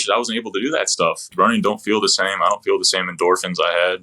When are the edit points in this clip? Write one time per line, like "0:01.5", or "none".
0:01.2